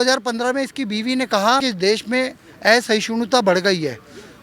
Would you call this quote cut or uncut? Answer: cut